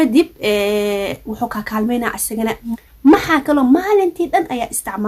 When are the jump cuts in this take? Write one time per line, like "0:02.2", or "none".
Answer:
0:02.7